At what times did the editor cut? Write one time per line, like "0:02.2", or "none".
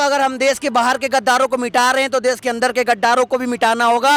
none